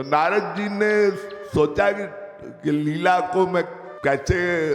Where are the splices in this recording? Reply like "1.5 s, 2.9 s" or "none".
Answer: 3.8 s